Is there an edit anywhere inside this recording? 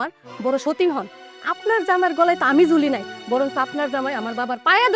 no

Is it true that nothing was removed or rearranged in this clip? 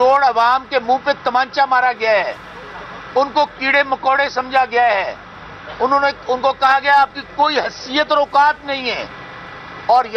yes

